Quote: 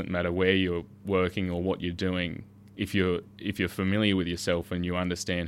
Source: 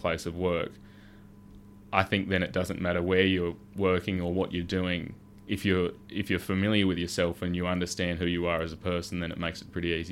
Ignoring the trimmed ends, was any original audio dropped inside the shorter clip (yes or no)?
no